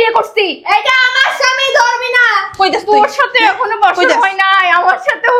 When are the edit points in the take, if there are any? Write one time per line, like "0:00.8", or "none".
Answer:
none

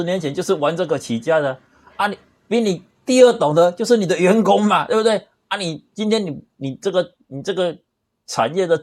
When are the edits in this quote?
none

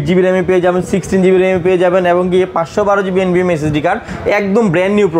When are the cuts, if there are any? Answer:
none

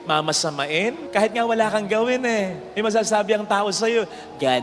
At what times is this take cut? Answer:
0:01.0

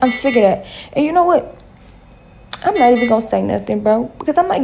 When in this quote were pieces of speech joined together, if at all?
none

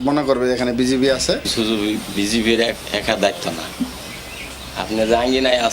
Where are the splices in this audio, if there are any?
0:01.5

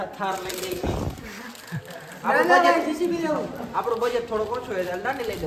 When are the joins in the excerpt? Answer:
none

